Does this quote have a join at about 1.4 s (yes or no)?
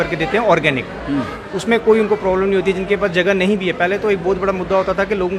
no